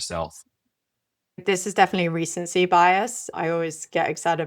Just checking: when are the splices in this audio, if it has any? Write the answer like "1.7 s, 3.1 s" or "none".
1.4 s, 3.2 s

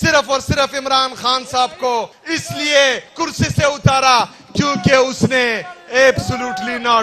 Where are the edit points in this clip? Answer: 2.2 s, 3.1 s

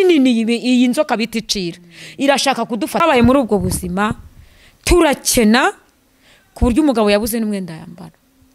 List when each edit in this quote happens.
3.0 s

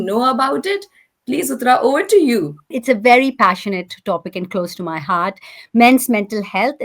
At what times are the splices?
2.8 s

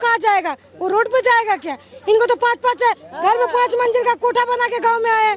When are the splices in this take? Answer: none

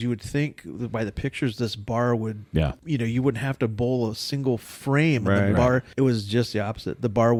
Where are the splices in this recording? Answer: none

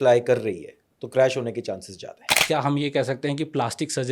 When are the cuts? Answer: 2.4 s

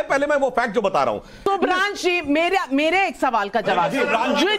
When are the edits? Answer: 1.4 s

